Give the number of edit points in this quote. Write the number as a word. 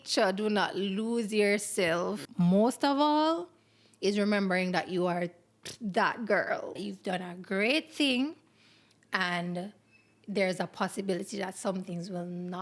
two